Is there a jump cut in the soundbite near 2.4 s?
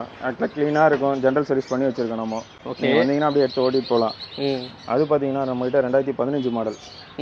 no; 0 cuts

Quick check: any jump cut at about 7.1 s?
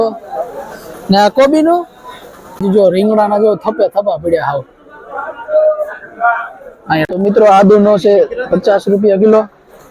yes; 2 cuts; at 2.6 s, 7.1 s

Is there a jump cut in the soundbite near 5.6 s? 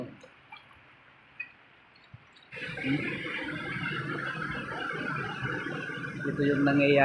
no; 1 cut; at 2.5 s

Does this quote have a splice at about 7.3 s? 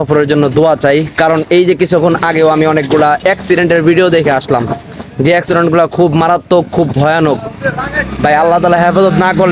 no; 0 cuts

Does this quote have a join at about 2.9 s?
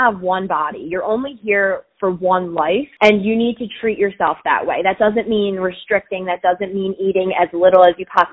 yes; 1 cut; at 2.9 s

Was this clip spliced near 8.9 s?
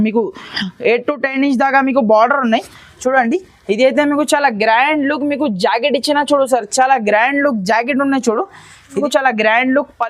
yes; 1 cut; at 8.9 s

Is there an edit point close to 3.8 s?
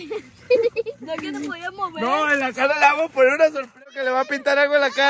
yes; 1 cut; at 3.8 s

